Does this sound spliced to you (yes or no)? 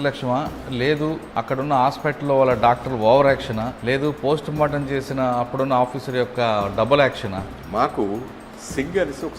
yes